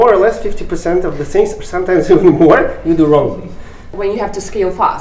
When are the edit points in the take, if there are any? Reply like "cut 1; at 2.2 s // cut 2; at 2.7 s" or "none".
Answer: cut 1; at 3.9 s

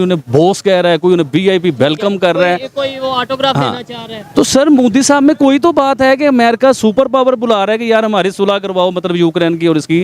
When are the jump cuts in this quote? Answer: none

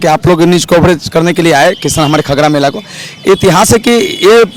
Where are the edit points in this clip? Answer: none

